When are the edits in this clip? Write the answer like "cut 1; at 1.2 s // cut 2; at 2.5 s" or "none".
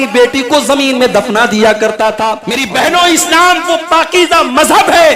cut 1; at 2.5 s